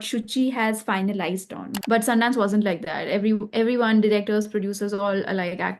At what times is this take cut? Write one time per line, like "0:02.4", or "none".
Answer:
0:01.8